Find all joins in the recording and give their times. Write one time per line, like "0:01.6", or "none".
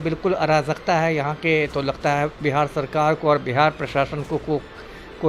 none